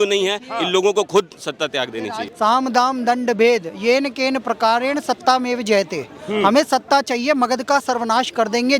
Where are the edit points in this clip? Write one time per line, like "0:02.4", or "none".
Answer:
0:02.2